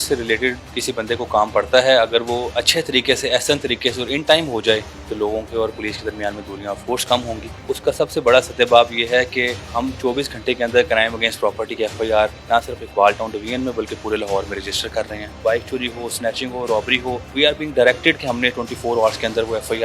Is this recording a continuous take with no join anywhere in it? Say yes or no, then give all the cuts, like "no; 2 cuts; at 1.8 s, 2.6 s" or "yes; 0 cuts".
no; 6 cuts; at 5.0 s, 7.5 s, 9.7 s, 12.4 s, 15.4 s, 17.3 s